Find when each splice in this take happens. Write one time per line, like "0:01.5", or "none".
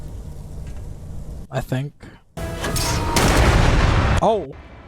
0:02.4